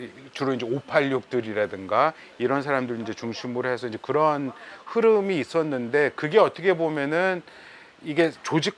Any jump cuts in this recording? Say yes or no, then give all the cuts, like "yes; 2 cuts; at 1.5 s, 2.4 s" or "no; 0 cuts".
no; 0 cuts